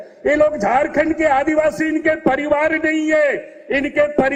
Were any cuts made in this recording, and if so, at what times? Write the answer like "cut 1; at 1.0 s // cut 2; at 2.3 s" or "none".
none